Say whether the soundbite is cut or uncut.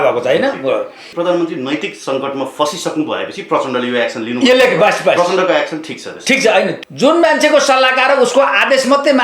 cut